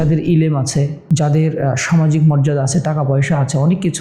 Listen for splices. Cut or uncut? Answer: cut